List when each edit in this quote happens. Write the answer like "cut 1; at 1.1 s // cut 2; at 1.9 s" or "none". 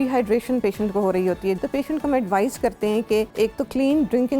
cut 1; at 1.6 s // cut 2; at 3.3 s